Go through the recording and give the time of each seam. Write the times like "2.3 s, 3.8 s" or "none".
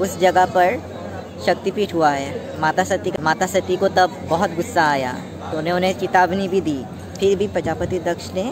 3.1 s